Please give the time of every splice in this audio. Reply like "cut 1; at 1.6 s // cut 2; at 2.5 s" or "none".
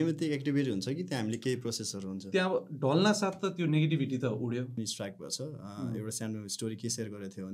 cut 1; at 4.7 s